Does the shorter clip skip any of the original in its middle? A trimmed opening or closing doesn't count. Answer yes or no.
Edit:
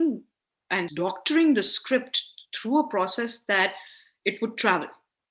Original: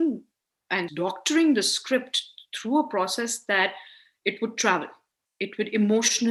no